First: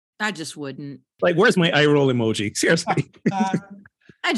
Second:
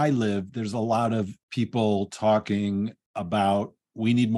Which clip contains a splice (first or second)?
first